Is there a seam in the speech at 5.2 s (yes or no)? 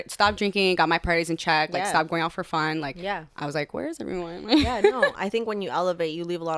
yes